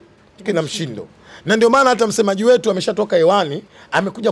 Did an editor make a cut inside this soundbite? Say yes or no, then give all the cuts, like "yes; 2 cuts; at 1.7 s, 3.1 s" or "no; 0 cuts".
no; 0 cuts